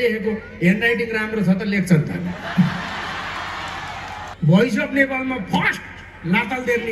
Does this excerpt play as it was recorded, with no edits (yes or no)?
no